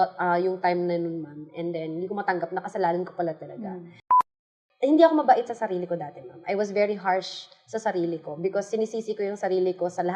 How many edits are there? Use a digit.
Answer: 1